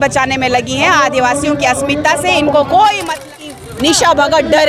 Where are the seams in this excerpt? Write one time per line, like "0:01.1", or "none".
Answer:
0:03.5